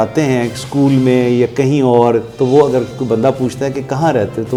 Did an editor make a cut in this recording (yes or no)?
no